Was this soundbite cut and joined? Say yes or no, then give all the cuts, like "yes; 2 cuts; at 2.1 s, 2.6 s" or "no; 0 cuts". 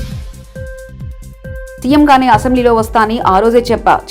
no; 0 cuts